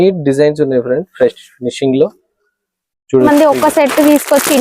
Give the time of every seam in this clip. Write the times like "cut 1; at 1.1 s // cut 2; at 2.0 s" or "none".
cut 1; at 3.3 s